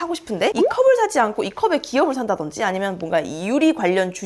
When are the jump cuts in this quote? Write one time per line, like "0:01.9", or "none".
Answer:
none

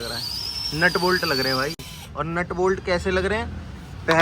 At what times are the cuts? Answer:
none

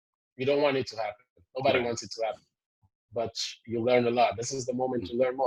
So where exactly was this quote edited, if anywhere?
none

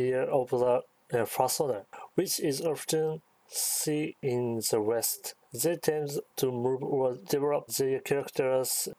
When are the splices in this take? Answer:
0:04.2
0:05.2
0:06.3
0:07.4

